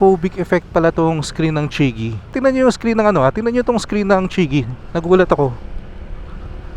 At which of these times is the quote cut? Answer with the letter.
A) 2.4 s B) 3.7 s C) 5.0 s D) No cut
A